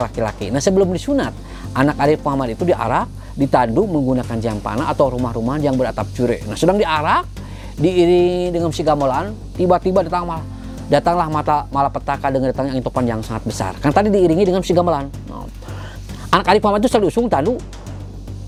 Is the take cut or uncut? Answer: uncut